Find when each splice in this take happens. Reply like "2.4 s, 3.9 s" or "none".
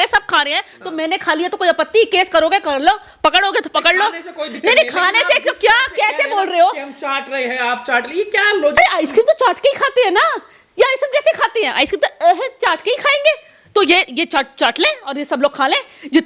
none